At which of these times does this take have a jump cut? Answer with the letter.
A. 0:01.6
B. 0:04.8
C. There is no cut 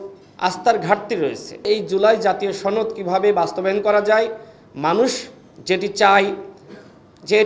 A